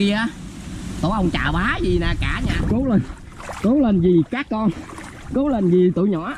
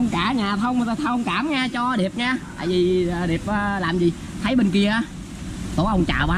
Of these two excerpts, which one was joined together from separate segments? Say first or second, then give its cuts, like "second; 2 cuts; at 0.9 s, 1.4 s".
first; 1 cut; at 2.6 s